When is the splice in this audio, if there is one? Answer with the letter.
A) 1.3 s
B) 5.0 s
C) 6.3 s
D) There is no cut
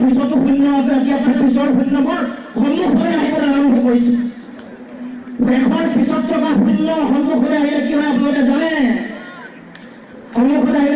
A